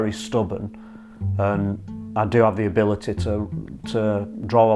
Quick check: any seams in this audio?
no; 0 cuts

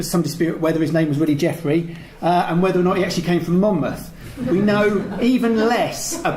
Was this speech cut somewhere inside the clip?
no; 0 cuts

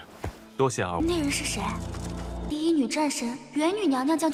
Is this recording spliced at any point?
no; 0 cuts

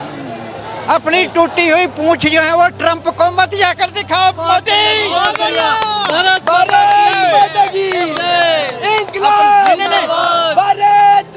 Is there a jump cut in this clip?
no; 0 cuts

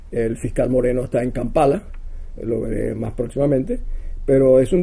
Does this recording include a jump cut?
yes; 1 cut; at 3.5 s

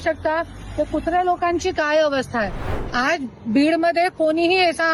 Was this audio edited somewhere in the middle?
yes; 1 cut; at 2.7 s

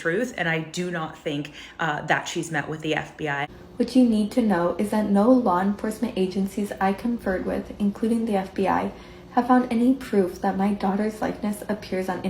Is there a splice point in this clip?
yes; 1 cut; at 3.5 s

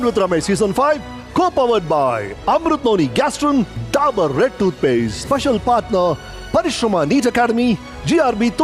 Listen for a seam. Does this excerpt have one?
no; 0 cuts

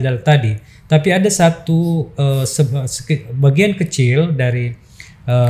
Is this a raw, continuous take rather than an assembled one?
yes; 0 cuts

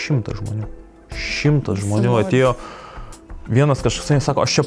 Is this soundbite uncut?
yes; 0 cuts

